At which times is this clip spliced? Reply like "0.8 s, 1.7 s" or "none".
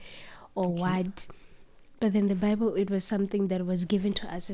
none